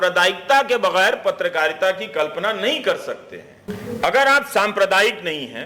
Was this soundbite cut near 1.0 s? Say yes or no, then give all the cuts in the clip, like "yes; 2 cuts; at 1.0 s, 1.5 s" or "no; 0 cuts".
no; 1 cut; at 3.7 s